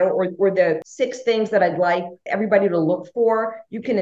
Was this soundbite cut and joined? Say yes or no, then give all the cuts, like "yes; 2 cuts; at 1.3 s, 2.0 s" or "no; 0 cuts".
yes; 2 cuts; at 0.9 s, 2.2 s